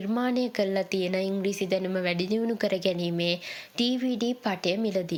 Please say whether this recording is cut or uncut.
uncut